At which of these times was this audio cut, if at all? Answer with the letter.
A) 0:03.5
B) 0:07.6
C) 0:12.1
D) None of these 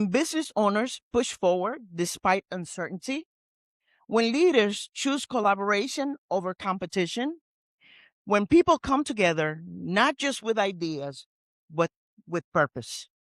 D